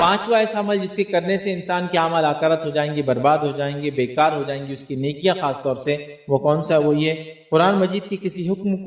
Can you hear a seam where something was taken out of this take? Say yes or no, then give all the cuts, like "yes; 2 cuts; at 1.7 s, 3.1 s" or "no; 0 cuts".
no; 0 cuts